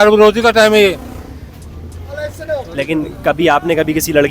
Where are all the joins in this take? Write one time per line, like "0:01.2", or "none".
0:02.7